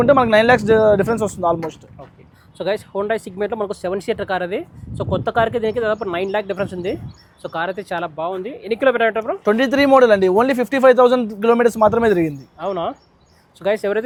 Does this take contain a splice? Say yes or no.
no